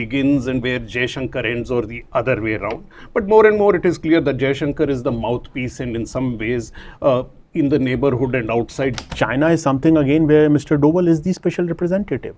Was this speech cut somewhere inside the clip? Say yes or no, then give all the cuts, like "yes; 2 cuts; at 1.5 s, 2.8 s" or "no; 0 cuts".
yes; 1 cut; at 9.1 s